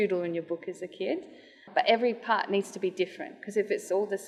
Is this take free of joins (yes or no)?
yes